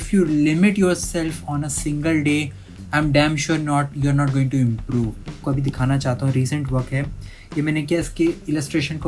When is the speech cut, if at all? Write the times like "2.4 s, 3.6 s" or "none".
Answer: 5.4 s